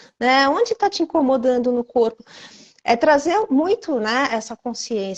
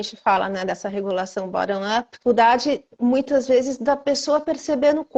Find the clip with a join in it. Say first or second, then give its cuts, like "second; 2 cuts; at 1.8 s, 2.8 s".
second; 1 cut; at 2.1 s